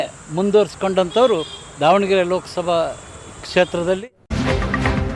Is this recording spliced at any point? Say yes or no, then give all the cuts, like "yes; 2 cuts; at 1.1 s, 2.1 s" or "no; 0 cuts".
yes; 1 cut; at 4.3 s